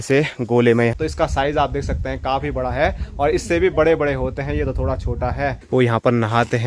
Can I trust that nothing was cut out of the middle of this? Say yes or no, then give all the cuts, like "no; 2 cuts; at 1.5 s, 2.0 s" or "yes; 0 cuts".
no; 2 cuts; at 0.9 s, 5.6 s